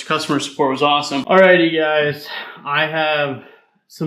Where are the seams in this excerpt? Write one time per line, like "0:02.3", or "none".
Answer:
0:01.2